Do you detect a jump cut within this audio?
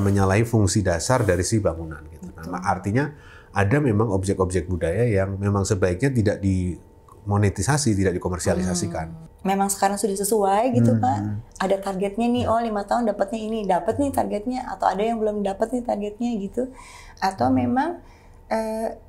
yes; 1 cut; at 9.2 s

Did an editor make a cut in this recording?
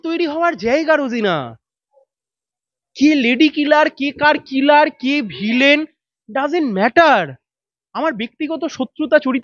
no; 0 cuts

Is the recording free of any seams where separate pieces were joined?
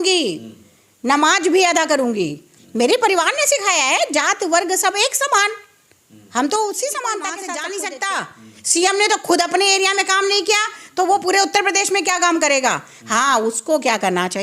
no; 1 cut; at 7.4 s

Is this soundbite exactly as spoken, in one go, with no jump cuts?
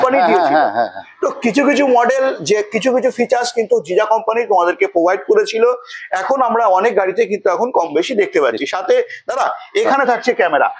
yes; 0 cuts

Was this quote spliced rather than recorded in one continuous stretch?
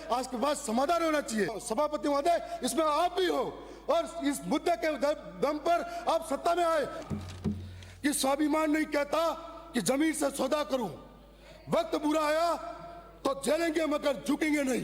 yes; 2 cuts; at 1.6 s, 7.0 s

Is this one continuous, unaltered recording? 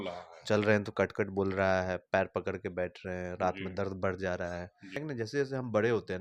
no; 1 cut; at 5.0 s

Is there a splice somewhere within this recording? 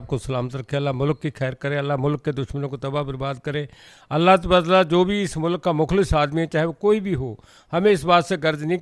no; 0 cuts

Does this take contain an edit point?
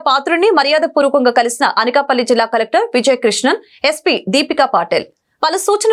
no; 0 cuts

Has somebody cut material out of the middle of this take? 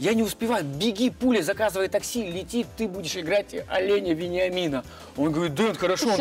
no; 0 cuts

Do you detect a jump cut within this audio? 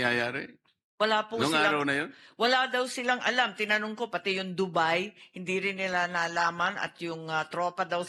no; 0 cuts

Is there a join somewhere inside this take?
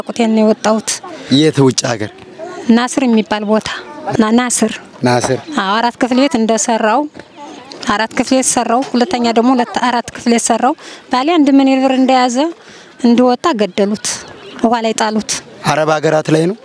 no; 0 cuts

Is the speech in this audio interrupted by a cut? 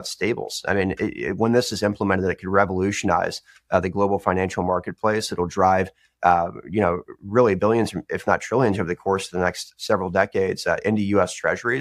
no; 0 cuts

